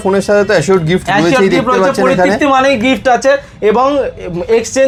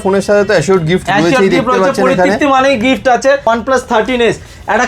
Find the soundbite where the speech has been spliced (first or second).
second